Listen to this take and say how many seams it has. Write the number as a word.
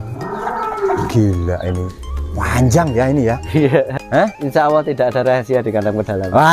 one